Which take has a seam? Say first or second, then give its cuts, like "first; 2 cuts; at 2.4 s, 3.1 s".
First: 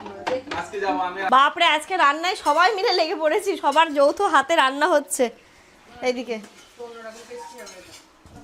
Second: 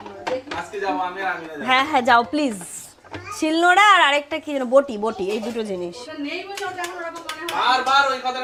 first; 1 cut; at 1.3 s